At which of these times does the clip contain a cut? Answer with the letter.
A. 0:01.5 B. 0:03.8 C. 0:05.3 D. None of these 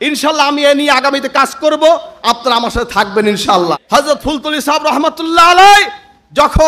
B